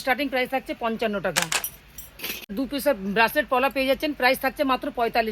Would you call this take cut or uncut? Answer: cut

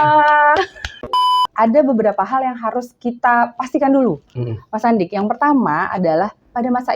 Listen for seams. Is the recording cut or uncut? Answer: cut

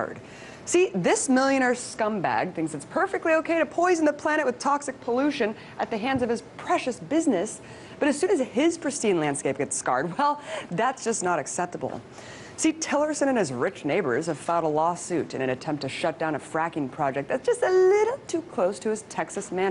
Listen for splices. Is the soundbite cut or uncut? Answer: uncut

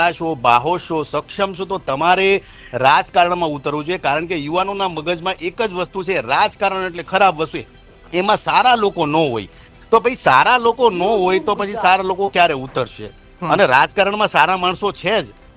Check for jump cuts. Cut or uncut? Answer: uncut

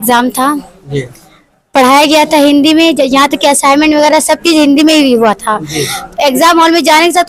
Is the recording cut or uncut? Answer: uncut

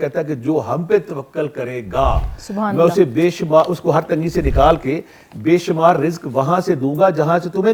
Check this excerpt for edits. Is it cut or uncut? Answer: uncut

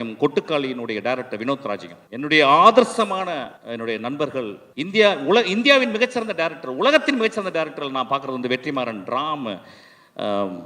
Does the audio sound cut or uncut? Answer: cut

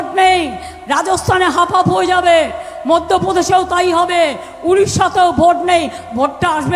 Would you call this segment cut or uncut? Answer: uncut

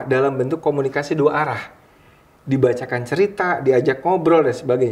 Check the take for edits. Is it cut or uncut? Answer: uncut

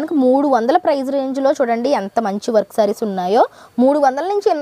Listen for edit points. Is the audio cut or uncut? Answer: uncut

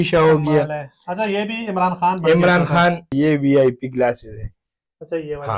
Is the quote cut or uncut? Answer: cut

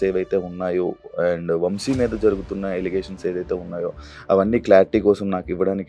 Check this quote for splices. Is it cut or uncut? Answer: uncut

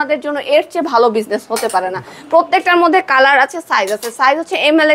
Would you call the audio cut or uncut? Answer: uncut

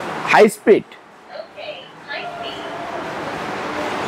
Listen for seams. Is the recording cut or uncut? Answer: uncut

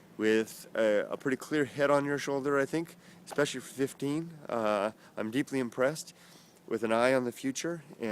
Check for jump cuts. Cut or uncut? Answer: cut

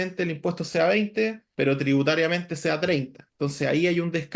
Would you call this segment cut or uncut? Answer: cut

